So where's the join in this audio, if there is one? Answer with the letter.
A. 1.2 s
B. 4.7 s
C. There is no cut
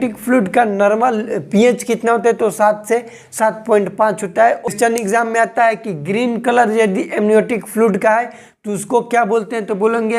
B